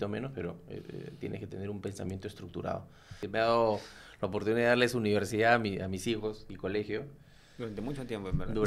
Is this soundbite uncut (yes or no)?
no